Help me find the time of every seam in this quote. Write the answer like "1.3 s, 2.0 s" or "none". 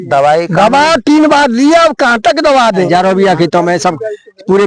2.9 s